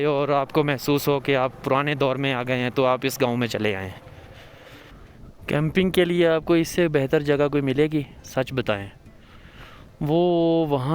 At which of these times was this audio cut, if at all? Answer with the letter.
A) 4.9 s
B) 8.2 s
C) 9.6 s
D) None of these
A